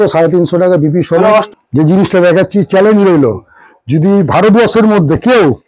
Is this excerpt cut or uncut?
cut